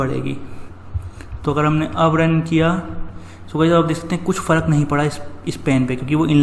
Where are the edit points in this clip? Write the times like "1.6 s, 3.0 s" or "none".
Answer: none